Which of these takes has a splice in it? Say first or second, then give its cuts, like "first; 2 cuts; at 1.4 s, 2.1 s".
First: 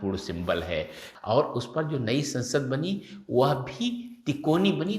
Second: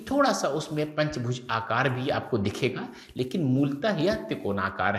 first; 1 cut; at 1.1 s